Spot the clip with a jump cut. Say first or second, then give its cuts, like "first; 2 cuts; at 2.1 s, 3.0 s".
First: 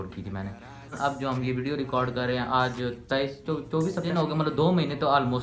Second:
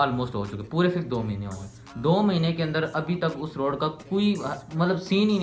first; 2 cuts; at 0.9 s, 4.1 s